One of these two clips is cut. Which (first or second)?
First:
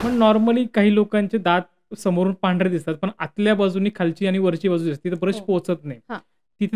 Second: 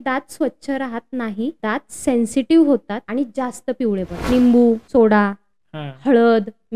second